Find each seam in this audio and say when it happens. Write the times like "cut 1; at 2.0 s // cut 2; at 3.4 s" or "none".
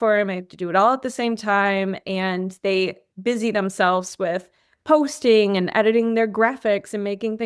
none